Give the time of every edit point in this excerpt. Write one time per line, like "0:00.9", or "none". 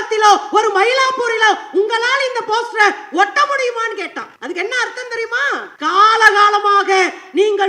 0:04.3
0:05.7